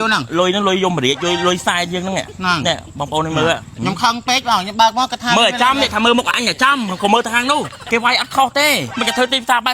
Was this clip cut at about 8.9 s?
yes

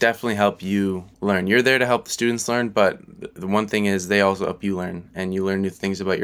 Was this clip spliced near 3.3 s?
no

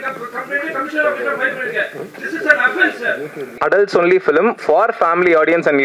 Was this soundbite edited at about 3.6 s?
yes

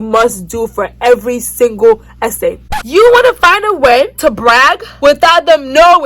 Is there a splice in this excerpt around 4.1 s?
no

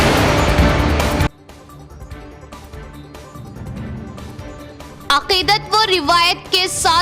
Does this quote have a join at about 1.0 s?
yes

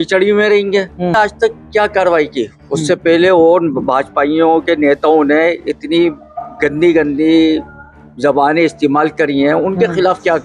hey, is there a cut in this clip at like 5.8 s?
no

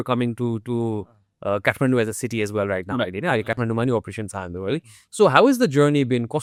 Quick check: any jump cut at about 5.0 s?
no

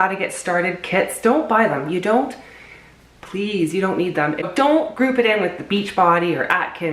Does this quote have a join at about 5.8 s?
no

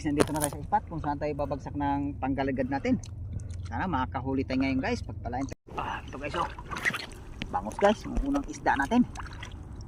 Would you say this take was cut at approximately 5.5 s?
yes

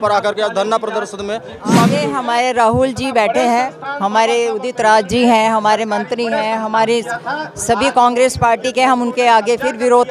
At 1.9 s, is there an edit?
yes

